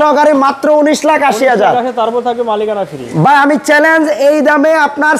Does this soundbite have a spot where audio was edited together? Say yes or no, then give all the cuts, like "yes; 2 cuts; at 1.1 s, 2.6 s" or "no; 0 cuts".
no; 0 cuts